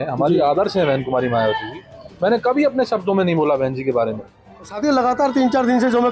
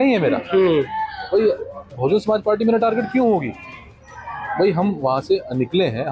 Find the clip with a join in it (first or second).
first